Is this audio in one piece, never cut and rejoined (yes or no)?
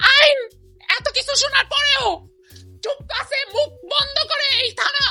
yes